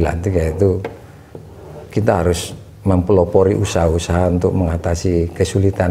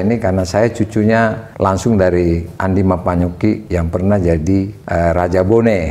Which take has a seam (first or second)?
second